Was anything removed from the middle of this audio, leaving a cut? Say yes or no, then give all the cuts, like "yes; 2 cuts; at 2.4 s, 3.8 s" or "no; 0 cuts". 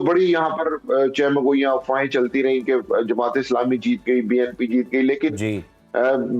no; 0 cuts